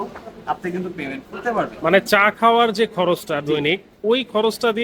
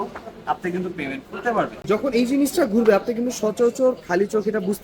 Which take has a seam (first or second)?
second